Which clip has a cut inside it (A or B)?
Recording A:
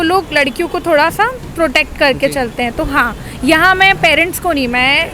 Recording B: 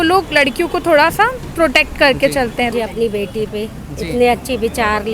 B